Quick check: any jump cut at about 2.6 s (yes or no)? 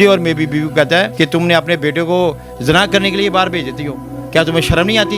no